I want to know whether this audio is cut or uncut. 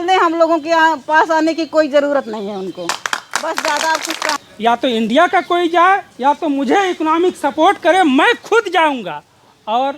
cut